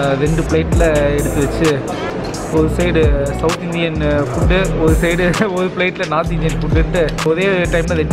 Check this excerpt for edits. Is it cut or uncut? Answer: uncut